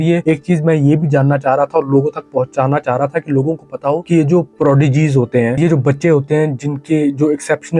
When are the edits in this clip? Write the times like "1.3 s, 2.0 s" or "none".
none